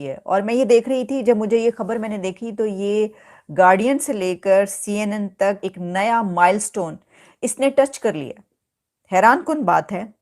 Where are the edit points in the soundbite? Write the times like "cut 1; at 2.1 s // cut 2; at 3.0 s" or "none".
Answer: cut 1; at 5.6 s